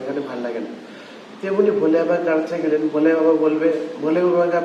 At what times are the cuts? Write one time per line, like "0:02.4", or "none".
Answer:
none

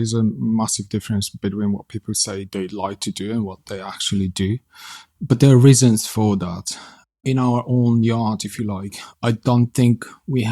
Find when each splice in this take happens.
0:02.5

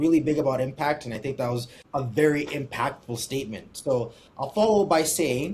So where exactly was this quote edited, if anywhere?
0:01.7

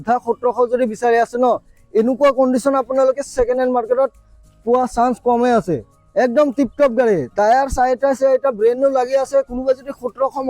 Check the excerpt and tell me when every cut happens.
0:05.9

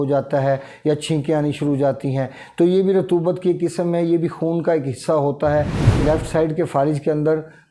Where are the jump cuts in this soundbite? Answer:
0:05.8

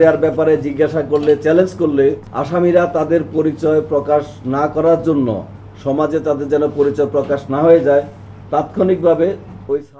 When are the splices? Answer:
0:02.3

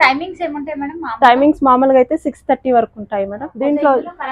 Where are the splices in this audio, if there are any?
0:03.4

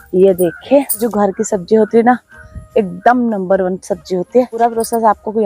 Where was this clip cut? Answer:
0:01.1
0:04.6

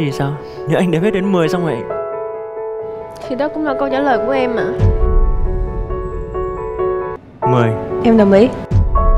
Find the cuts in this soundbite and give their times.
0:07.2

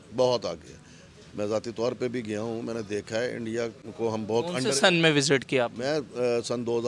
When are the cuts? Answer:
none

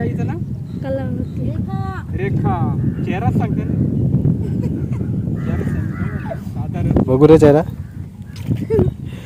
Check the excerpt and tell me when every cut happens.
none

